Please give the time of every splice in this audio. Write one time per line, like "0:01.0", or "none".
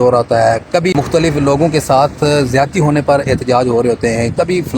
0:00.9